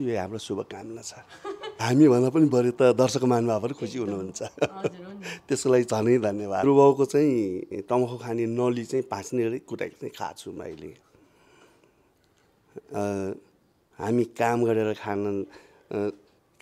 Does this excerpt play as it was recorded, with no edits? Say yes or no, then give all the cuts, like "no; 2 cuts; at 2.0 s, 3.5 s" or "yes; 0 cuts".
no; 2 cuts; at 1.8 s, 6.6 s